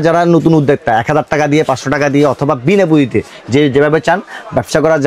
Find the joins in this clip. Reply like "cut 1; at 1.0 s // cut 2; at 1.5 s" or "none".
none